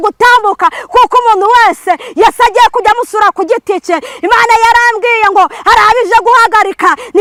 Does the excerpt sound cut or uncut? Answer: uncut